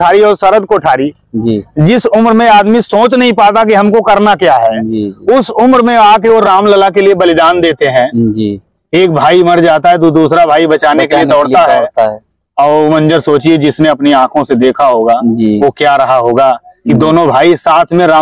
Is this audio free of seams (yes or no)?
yes